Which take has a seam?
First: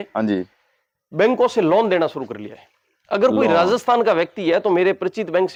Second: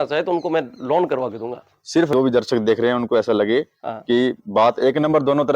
second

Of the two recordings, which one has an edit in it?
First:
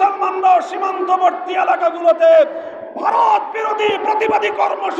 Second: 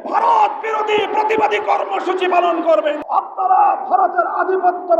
second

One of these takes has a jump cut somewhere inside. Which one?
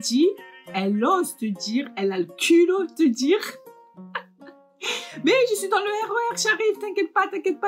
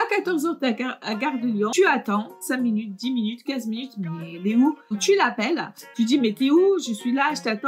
second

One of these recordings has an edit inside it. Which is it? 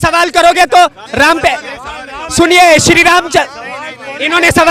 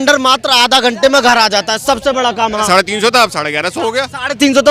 second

